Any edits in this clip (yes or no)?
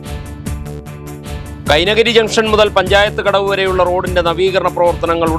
yes